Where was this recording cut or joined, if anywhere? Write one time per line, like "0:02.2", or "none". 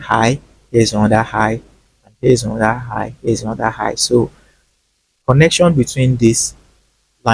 none